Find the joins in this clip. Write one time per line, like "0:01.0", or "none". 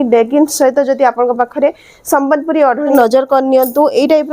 0:02.9